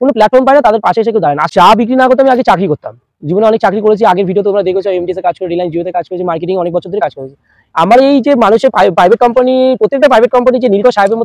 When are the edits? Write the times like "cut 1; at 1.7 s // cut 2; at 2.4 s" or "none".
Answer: cut 1; at 1.5 s